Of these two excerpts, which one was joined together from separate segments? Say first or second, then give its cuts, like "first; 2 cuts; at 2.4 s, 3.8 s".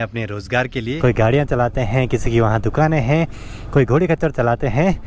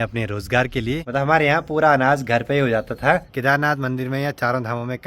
second; 2 cuts; at 1.0 s, 3.3 s